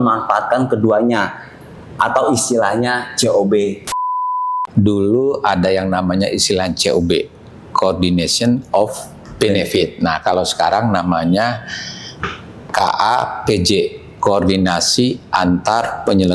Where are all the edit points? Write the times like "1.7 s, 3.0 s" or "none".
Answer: 4.4 s